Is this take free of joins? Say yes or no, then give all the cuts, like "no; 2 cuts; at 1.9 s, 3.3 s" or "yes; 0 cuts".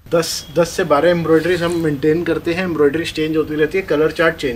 yes; 0 cuts